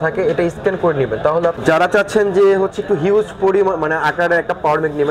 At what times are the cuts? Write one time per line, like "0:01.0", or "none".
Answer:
0:01.6